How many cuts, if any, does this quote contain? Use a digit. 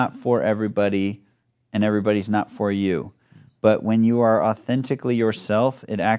0